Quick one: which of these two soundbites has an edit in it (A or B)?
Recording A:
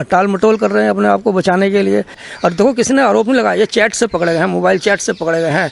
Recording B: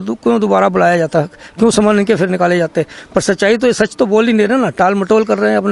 A